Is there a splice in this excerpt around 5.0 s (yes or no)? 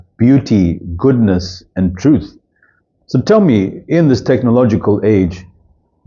no